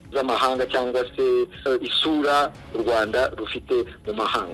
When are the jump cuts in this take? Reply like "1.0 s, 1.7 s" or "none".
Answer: none